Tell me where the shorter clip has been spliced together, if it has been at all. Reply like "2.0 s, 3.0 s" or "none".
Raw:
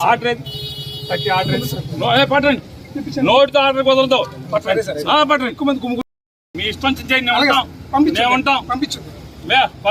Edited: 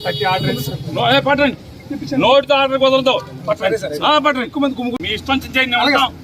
5.1 s